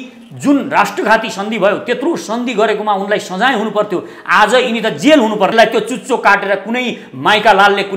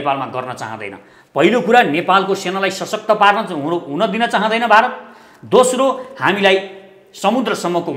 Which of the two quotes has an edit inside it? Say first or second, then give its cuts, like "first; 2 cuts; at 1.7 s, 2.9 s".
first; 1 cut; at 5.5 s